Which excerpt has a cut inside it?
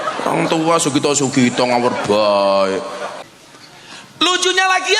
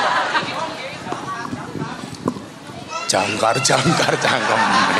first; 1 cut; at 3.1 s

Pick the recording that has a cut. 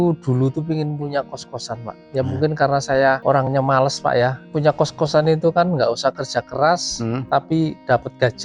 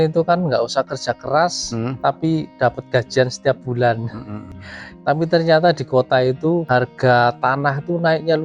second; 2 cuts; at 4.7 s, 6.7 s

